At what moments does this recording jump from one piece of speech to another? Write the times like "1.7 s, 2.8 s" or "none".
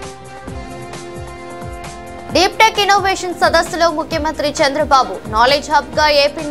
none

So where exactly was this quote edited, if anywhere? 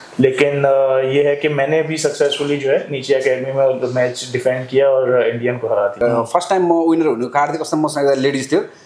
6.0 s

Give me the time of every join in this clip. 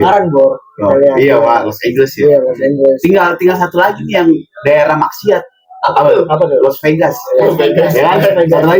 none

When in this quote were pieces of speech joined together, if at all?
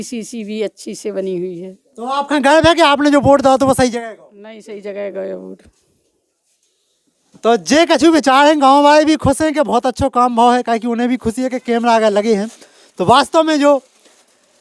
none

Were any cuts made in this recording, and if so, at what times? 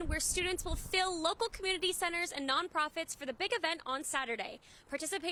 none

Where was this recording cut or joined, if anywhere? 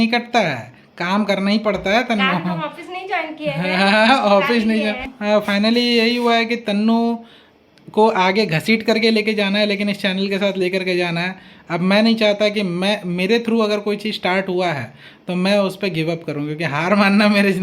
5.1 s

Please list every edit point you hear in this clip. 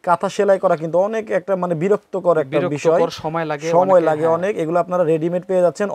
none

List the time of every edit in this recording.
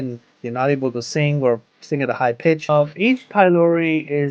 2.7 s

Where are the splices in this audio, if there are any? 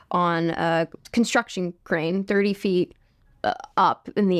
none

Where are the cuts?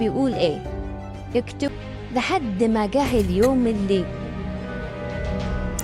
1.7 s

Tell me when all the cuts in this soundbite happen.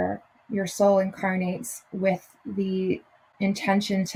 none

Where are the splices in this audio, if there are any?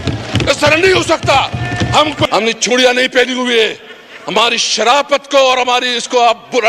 2.2 s

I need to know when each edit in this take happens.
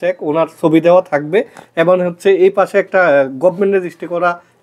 none

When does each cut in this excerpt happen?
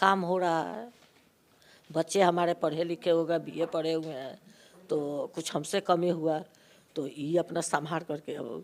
none

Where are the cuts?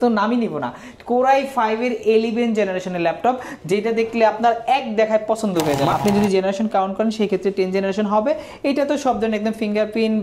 5.9 s

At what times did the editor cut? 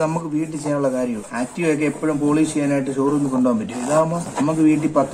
1.3 s, 4.2 s

